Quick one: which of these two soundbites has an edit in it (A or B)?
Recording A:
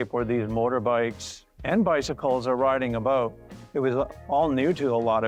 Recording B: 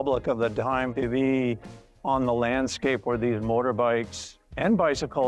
B